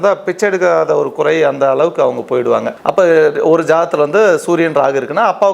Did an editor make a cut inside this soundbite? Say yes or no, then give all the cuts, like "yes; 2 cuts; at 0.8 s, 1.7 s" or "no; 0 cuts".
yes; 1 cut; at 2.7 s